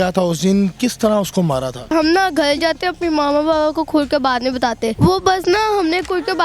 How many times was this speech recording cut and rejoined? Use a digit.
2